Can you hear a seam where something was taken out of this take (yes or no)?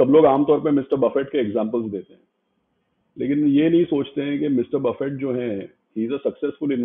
no